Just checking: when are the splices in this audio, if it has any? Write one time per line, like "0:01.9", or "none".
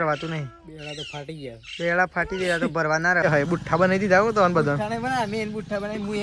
0:03.2